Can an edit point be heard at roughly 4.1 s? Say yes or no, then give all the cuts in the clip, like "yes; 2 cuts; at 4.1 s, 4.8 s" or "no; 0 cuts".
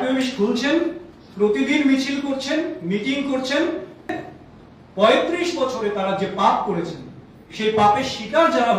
yes; 1 cut; at 4.1 s